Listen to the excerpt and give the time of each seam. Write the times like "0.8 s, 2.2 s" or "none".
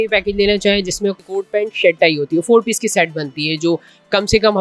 1.2 s